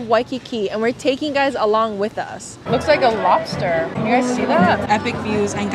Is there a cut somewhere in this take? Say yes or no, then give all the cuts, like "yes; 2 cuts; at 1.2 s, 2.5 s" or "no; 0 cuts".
yes; 3 cuts; at 2.6 s, 4.0 s, 4.8 s